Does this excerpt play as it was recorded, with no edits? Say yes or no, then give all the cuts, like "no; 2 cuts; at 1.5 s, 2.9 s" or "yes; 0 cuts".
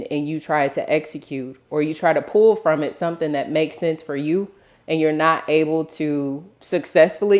no; 1 cut; at 6.5 s